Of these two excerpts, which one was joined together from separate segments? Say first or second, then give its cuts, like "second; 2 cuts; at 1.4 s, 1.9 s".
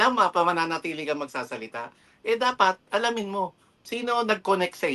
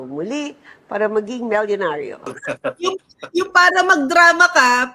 second; 1 cut; at 2.4 s